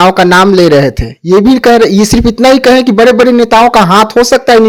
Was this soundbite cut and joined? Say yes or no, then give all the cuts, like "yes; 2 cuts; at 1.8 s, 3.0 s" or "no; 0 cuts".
no; 0 cuts